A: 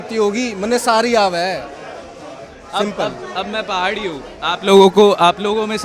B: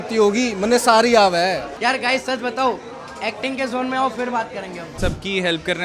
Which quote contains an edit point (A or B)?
B